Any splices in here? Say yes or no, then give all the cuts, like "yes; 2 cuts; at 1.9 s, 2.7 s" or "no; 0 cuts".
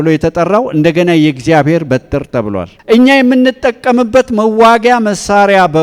no; 0 cuts